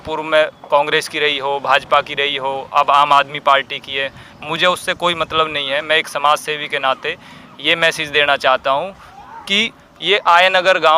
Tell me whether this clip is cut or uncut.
uncut